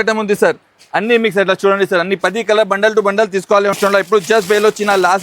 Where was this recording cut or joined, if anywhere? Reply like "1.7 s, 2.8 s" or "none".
3.8 s